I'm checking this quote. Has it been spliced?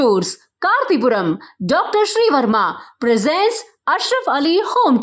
no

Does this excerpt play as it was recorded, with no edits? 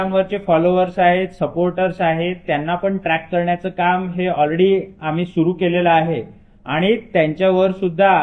yes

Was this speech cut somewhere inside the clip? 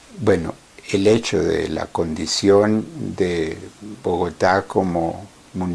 yes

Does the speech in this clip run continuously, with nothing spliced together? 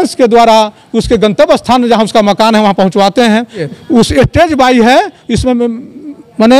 no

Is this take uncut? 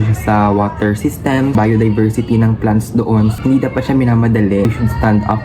no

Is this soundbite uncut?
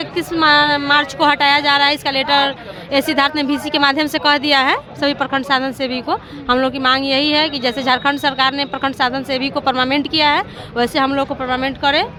yes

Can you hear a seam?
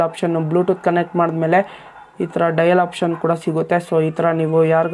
no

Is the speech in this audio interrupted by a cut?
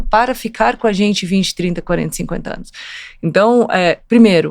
no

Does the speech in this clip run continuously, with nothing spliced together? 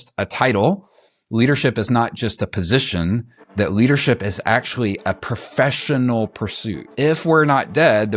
no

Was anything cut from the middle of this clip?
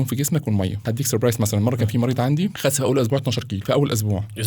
yes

